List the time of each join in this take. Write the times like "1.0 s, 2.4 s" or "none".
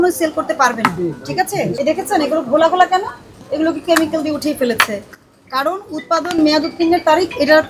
1.8 s